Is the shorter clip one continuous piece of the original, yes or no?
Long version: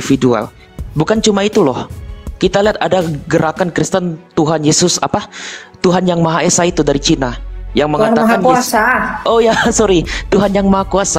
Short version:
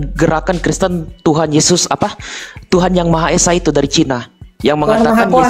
yes